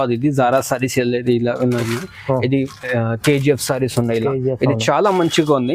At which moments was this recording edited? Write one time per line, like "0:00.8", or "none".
none